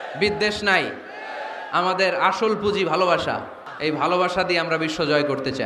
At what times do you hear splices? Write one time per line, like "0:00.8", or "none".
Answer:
0:03.6